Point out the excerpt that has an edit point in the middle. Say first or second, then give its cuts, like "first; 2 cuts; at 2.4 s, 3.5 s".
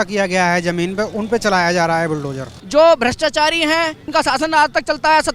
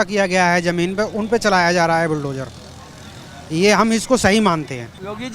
first; 2 cuts; at 2.6 s, 4.0 s